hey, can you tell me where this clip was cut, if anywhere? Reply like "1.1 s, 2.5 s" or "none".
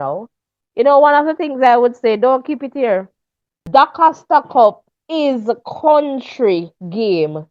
3.6 s